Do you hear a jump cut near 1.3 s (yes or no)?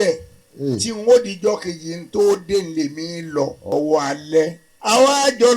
no